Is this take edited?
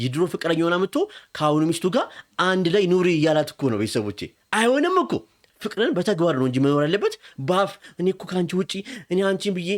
yes; 1 cut; at 5.4 s

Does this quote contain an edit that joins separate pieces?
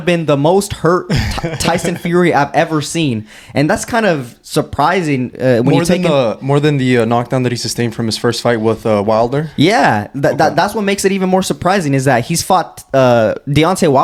no; 0 cuts

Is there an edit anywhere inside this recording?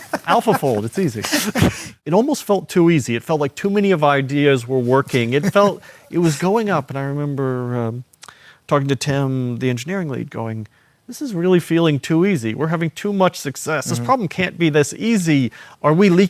yes; 1 cut; at 1.9 s

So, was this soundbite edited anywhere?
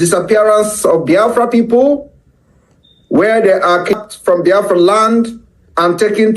yes; 1 cut; at 4.0 s

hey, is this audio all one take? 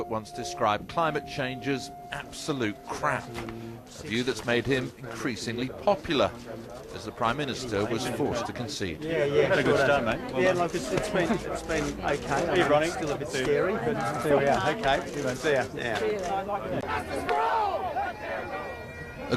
yes; 0 cuts

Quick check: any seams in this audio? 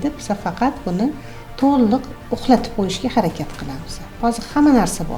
yes; 1 cut; at 4.1 s

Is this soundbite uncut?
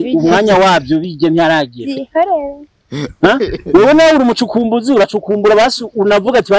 yes; 0 cuts

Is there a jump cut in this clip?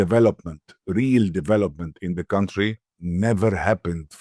yes; 1 cut; at 2.9 s

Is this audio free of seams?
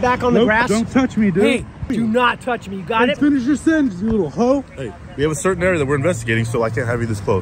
no; 2 cuts; at 1.8 s, 3.2 s

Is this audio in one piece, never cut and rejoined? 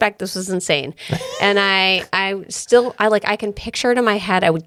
yes; 0 cuts

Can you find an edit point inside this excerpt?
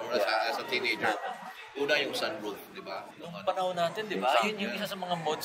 yes; 1 cut; at 3.1 s

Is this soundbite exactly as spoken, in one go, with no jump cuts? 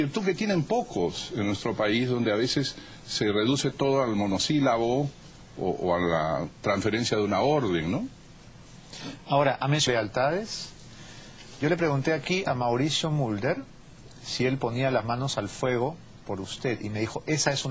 no; 1 cut; at 9.9 s

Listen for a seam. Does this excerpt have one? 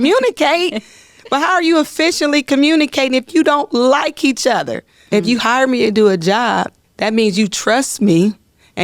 yes; 2 cuts; at 5.0 s, 6.8 s

